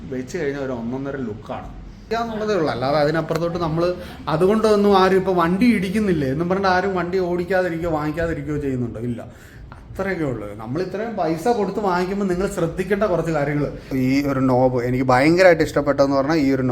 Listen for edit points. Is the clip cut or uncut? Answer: cut